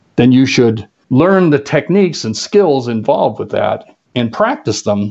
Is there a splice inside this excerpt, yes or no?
yes